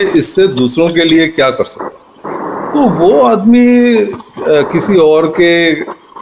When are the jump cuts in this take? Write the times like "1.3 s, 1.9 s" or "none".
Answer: none